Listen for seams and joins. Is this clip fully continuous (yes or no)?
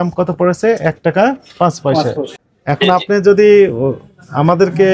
no